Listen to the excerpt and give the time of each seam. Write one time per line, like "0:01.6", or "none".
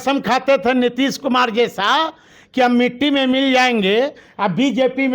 none